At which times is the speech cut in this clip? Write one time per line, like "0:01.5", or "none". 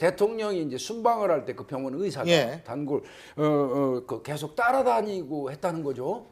none